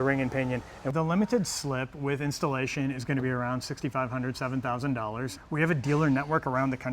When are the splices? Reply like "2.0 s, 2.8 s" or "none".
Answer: 0.8 s, 5.4 s